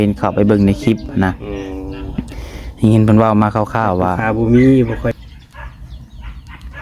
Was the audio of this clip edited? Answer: yes; 1 cut; at 5.1 s

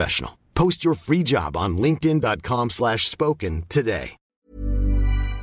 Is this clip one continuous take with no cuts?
no; 1 cut; at 4.4 s

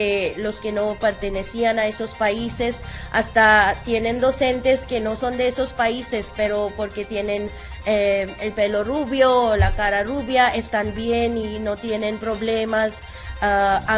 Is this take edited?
no; 0 cuts

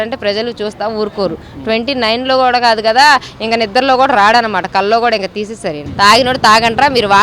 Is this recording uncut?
no; 1 cut; at 5.8 s

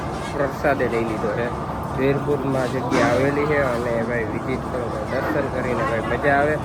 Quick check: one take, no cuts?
yes; 0 cuts

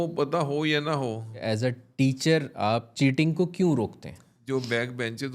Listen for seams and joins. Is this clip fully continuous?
no; 3 cuts; at 1.4 s, 2.9 s, 4.3 s

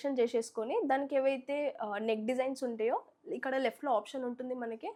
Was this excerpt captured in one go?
yes; 0 cuts

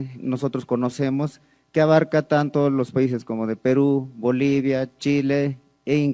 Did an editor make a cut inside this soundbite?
no; 0 cuts

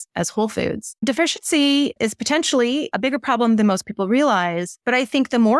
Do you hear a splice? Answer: yes; 4 cuts; at 1.0 s, 2.0 s, 2.9 s, 4.7 s

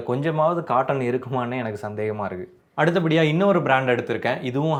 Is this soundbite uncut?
yes; 0 cuts

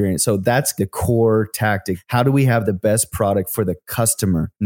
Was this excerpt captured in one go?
no; 2 cuts; at 0.8 s, 2.0 s

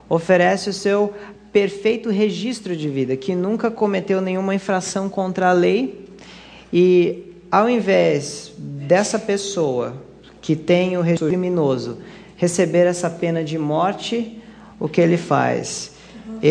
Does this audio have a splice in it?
yes; 1 cut; at 1.6 s

